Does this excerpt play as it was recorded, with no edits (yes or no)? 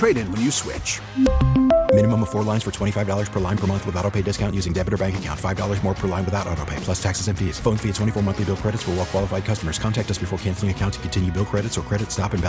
yes